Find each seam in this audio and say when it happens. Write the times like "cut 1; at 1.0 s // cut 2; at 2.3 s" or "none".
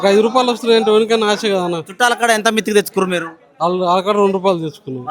none